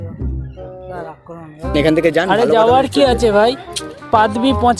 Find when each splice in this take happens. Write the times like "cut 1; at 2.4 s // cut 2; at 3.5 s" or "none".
cut 1; at 1.7 s